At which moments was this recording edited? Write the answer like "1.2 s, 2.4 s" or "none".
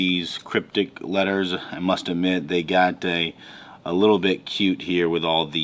none